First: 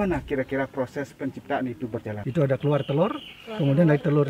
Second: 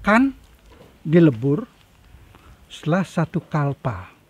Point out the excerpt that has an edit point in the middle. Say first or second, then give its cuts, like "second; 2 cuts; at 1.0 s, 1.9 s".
first; 1 cut; at 2.2 s